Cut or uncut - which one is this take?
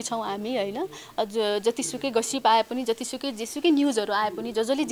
uncut